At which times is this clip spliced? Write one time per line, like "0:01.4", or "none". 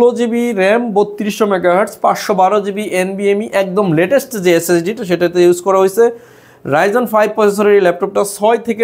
none